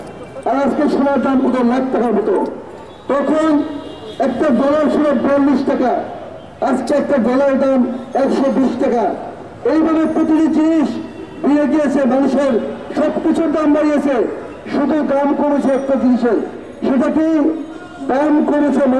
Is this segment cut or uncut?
uncut